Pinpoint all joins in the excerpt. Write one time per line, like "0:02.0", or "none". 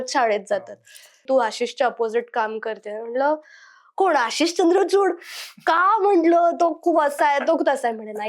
0:01.2